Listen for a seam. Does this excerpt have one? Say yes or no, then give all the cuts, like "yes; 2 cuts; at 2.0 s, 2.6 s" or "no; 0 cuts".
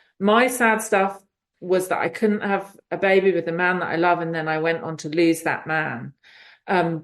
no; 0 cuts